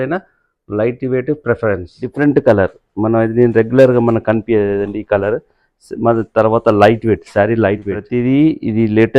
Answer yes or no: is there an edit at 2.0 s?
yes